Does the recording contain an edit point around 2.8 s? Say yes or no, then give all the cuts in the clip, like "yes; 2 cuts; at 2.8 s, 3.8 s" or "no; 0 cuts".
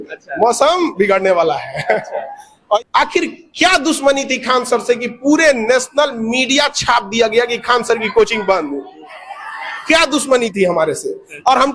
yes; 1 cut; at 2.8 s